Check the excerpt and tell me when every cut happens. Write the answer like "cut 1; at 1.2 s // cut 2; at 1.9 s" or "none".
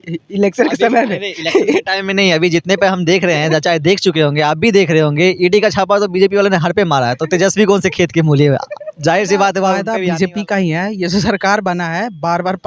cut 1; at 9.9 s